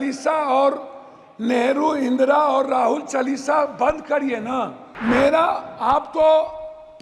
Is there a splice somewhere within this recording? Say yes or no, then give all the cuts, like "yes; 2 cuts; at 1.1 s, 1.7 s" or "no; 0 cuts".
yes; 1 cut; at 4.8 s